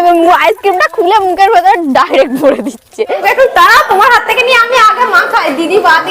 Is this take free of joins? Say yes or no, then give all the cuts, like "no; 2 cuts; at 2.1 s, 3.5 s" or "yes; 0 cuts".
no; 1 cut; at 3.2 s